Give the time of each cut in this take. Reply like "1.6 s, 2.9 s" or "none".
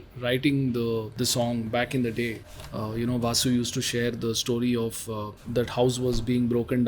1.1 s, 5.3 s

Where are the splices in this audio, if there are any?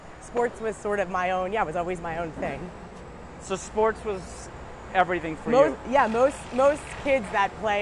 none

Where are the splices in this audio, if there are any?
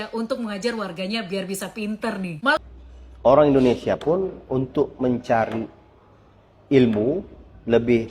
2.6 s

